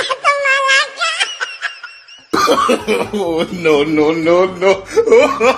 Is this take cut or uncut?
cut